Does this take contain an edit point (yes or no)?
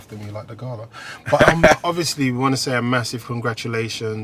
yes